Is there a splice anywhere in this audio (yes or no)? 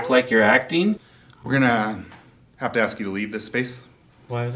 yes